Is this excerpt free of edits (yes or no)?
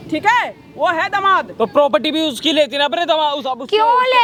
yes